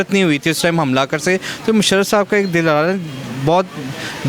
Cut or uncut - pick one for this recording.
cut